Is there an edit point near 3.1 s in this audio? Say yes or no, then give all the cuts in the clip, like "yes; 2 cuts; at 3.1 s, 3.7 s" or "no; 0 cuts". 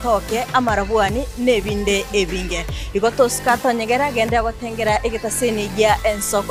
no; 0 cuts